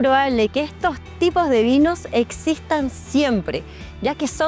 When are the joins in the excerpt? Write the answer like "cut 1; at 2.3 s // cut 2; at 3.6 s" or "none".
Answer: none

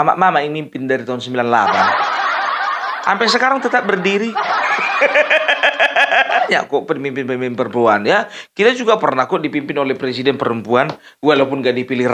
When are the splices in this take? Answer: cut 1; at 6.4 s

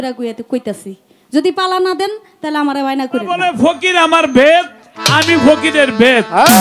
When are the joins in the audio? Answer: cut 1; at 3.3 s

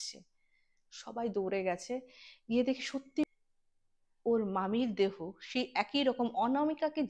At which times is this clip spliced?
cut 1; at 3.2 s

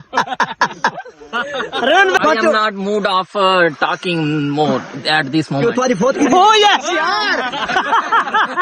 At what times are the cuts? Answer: cut 1; at 2.2 s

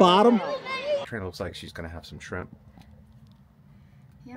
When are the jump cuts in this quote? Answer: cut 1; at 1.1 s

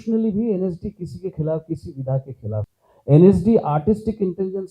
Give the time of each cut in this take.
cut 1; at 2.8 s

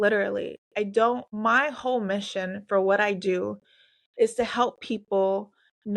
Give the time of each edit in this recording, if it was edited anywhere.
cut 1; at 1.3 s

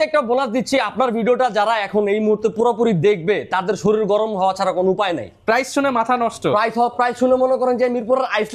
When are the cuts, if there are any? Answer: none

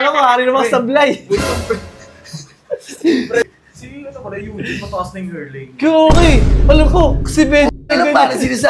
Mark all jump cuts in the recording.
cut 1; at 3.4 s

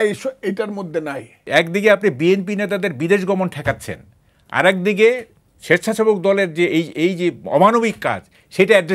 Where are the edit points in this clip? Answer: cut 1; at 1.4 s

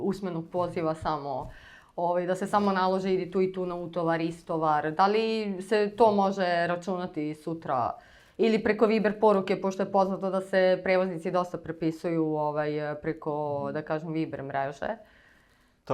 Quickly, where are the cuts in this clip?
none

